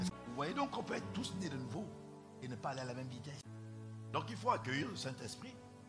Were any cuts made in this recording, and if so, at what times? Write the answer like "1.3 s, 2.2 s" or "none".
none

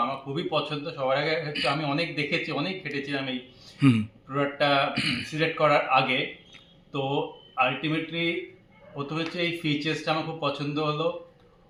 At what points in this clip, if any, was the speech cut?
none

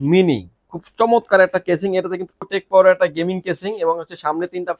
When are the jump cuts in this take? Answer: 2.4 s

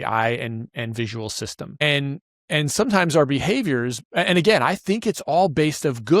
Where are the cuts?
1.8 s

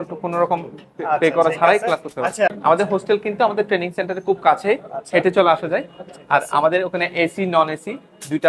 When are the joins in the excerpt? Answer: 2.5 s

